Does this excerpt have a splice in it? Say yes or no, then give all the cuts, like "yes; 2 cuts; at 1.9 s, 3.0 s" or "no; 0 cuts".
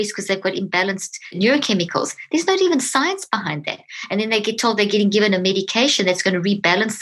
no; 0 cuts